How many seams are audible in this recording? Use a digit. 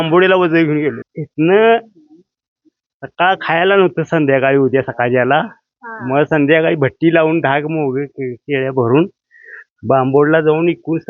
1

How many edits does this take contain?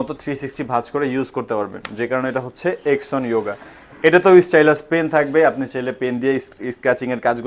0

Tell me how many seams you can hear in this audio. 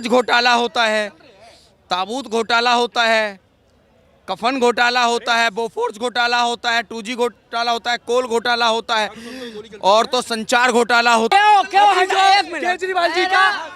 1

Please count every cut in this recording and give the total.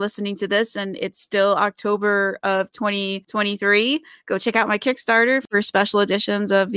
1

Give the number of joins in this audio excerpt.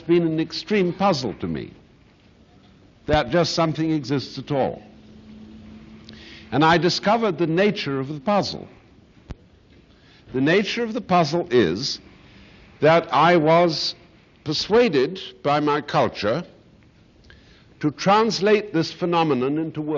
0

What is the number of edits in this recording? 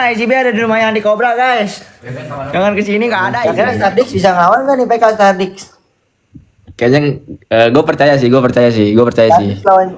1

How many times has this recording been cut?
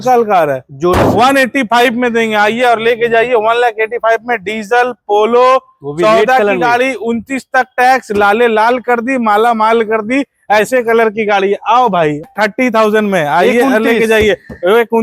1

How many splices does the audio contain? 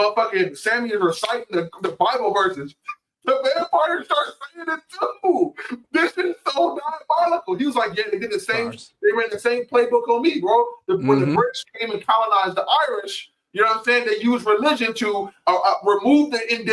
0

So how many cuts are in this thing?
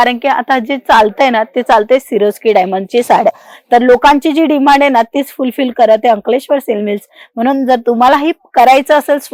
0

